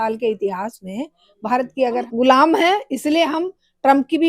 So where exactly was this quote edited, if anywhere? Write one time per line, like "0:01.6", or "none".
0:02.1